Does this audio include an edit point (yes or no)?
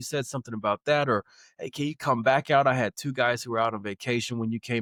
no